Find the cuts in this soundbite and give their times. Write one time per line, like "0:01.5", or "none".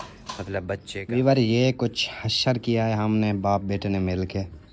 0:01.0